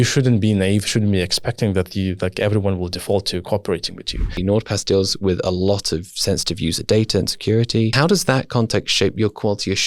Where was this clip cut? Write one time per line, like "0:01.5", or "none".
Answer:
0:04.4
0:07.9